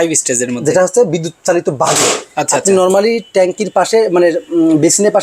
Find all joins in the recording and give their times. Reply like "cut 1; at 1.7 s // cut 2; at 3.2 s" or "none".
none